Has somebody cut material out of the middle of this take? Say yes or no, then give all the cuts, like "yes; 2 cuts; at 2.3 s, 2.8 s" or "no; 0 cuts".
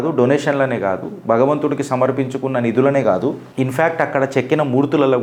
no; 0 cuts